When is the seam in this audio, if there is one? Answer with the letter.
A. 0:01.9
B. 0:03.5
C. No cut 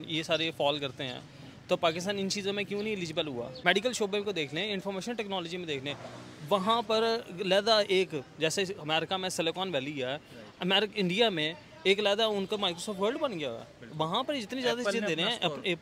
B